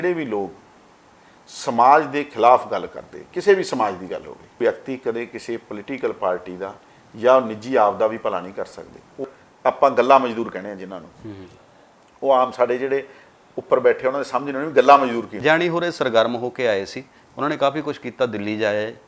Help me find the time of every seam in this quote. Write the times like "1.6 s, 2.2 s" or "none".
4.6 s, 9.2 s, 15.3 s